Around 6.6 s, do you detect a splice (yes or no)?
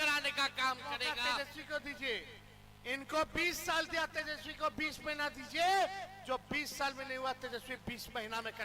no